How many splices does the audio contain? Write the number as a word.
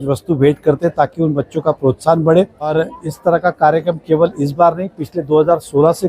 one